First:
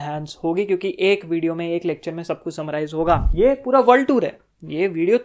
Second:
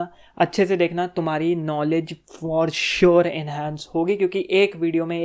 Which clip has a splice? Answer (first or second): first